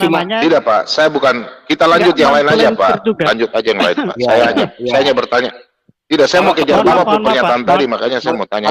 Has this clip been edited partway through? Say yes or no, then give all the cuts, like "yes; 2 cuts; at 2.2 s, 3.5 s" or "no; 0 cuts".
no; 0 cuts